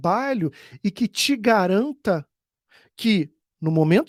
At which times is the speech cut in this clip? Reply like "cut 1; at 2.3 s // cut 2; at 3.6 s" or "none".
none